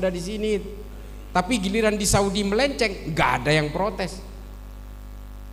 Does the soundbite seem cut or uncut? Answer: uncut